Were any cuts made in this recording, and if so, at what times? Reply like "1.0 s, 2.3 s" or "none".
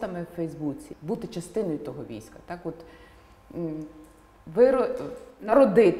0.9 s

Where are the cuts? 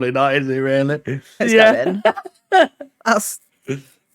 1.4 s

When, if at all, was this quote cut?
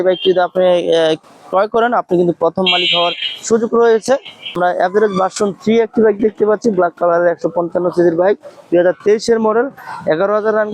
4.4 s

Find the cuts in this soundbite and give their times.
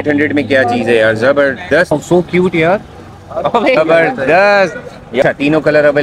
1.9 s, 3.8 s, 5.2 s

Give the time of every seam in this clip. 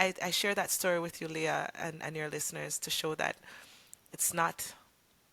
none

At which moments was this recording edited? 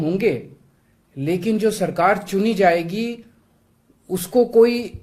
none

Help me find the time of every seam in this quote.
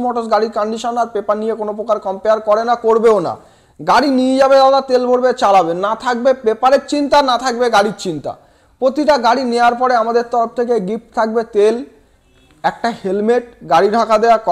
none

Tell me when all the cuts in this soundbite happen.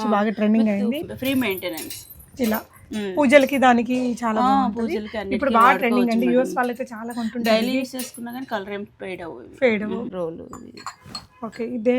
1.0 s, 10.1 s

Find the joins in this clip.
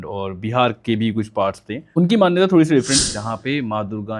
1.9 s, 3.1 s

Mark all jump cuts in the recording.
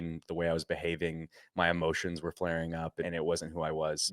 3.1 s

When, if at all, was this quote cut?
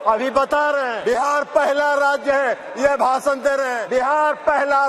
0.9 s, 3.8 s

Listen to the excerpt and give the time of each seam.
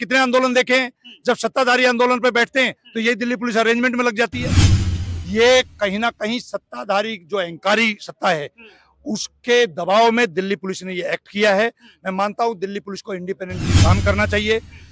4.9 s

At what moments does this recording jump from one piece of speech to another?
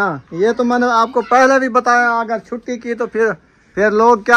3.5 s

